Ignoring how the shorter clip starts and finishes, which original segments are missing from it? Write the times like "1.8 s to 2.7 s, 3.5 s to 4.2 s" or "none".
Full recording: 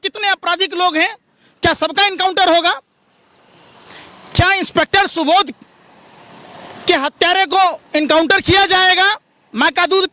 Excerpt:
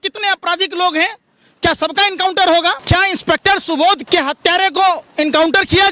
2.8 s to 4.3 s, 5.5 s to 6.8 s